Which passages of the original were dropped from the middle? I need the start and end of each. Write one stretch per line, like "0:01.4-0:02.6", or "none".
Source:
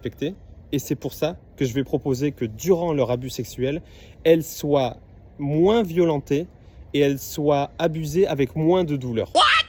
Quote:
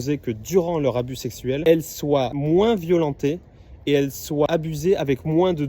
0:03.8-0:04.2
0:05.0-0:05.4
0:07.5-0:07.8